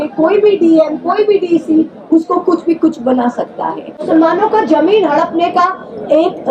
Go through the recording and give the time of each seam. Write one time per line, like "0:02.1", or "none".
0:04.0